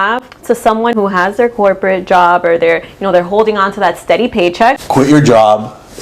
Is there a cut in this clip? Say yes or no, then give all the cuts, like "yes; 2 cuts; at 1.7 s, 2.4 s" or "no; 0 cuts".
yes; 2 cuts; at 0.9 s, 4.8 s